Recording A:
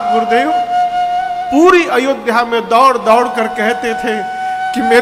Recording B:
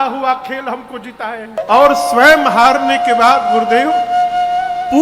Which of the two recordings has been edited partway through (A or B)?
B